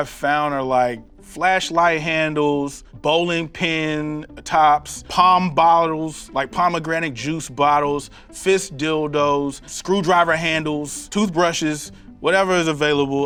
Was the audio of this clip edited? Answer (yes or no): no